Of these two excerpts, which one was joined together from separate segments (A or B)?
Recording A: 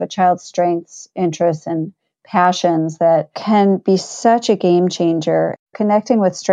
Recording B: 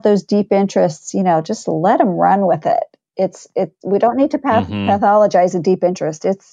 A